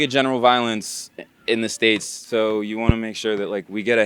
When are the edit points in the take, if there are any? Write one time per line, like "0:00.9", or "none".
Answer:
0:02.1